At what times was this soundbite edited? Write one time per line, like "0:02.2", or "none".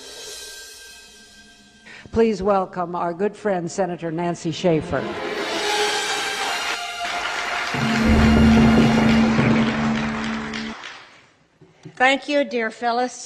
0:06.4